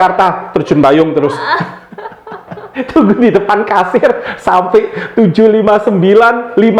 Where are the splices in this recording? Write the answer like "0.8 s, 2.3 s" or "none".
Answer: 2.7 s